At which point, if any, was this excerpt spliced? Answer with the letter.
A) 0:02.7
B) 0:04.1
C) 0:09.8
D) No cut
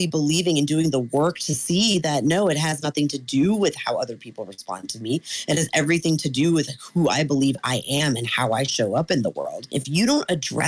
C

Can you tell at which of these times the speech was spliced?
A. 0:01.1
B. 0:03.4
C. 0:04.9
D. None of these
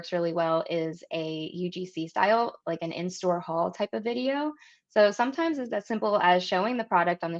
D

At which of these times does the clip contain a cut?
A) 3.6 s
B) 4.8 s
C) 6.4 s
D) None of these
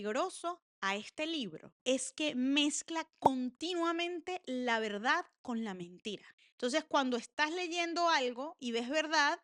D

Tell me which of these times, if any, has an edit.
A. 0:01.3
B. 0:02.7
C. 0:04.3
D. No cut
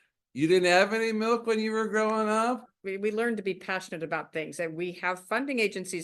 B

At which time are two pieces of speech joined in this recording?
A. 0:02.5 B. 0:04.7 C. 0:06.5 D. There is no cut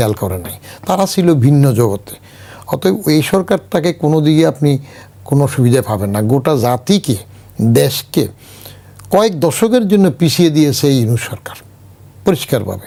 D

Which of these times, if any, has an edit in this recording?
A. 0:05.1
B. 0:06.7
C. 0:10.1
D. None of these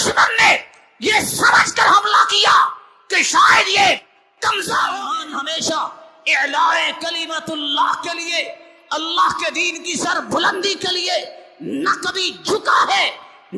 A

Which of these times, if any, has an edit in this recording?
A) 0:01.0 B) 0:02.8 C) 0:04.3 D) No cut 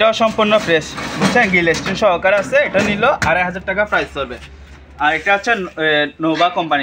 D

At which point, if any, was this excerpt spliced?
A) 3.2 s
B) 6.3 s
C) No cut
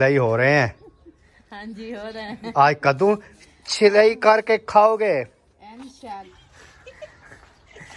B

